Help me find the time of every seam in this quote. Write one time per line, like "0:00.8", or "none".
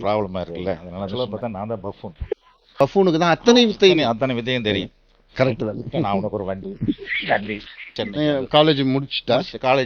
0:01.1
0:02.8
0:07.9